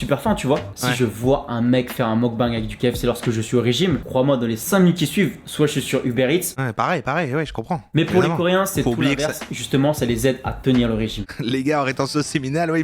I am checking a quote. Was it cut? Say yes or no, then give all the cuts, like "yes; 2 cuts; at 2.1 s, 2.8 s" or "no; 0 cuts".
yes; 1 cut; at 11.3 s